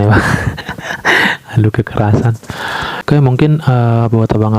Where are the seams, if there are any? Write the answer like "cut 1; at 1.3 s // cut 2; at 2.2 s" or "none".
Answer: cut 1; at 3.0 s